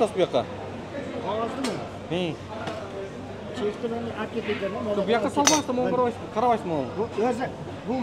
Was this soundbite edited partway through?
no; 0 cuts

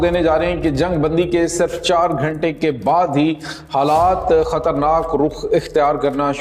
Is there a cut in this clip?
no; 0 cuts

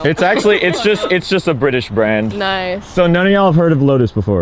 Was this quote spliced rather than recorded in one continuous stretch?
no; 0 cuts

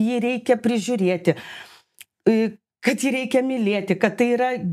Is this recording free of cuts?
yes; 0 cuts

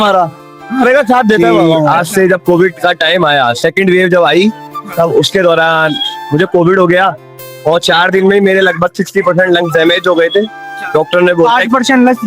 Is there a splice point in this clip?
yes; 1 cut; at 1.9 s

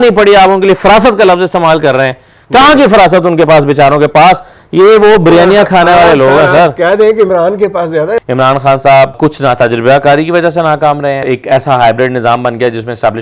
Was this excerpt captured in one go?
no; 3 cuts; at 8.2 s, 9.2 s, 11.2 s

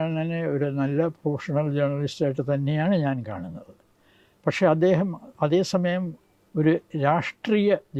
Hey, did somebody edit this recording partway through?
no; 0 cuts

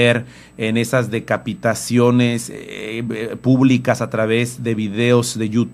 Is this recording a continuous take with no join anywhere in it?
yes; 0 cuts

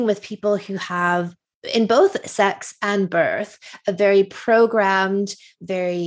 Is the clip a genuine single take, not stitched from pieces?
yes; 0 cuts

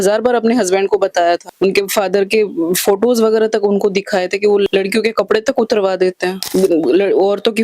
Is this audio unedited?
no; 1 cut; at 4.7 s

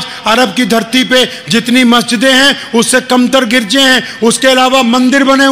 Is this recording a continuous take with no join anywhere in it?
yes; 0 cuts

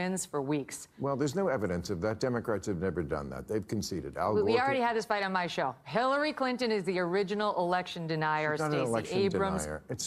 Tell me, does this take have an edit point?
no; 0 cuts

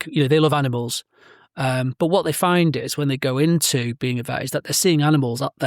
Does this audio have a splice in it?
no; 0 cuts

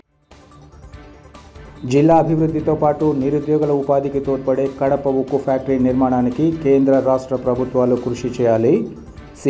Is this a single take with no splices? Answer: no; 1 cut; at 1.6 s

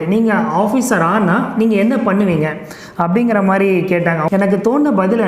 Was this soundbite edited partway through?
yes; 1 cut; at 4.2 s

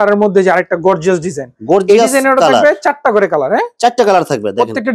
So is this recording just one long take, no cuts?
yes; 0 cuts

